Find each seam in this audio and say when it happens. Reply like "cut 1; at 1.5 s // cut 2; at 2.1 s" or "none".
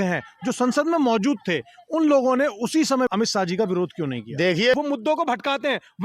cut 1; at 3.1 s // cut 2; at 4.8 s